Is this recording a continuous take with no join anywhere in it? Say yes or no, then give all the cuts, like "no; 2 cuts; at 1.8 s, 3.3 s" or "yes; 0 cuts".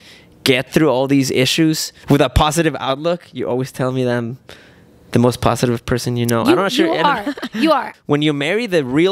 no; 2 cuts; at 1.9 s, 7.9 s